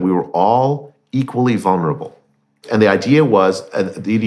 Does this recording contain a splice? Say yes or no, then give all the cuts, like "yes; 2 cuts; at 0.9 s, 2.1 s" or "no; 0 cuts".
yes; 1 cut; at 2.7 s